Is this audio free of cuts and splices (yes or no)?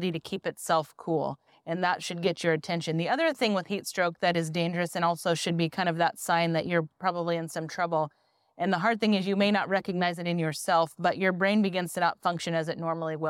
yes